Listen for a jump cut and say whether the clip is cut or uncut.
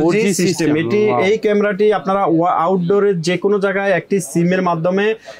uncut